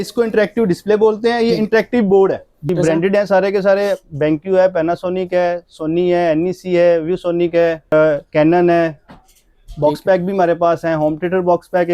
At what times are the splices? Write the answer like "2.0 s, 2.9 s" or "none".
2.7 s, 7.9 s